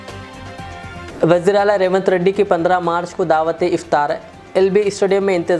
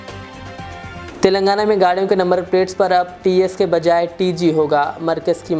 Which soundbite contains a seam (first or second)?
first